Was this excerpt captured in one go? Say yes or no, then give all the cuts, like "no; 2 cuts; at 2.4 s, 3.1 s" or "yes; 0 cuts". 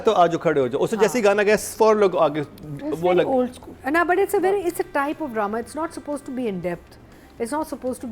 yes; 0 cuts